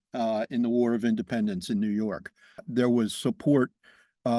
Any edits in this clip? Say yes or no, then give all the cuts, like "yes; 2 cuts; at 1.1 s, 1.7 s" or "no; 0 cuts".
yes; 1 cut; at 2.7 s